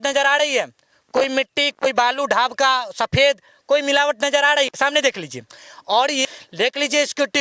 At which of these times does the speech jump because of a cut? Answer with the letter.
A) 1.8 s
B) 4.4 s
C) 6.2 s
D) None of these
C